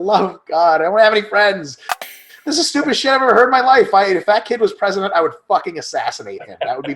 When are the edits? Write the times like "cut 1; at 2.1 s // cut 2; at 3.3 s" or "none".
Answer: cut 1; at 2.0 s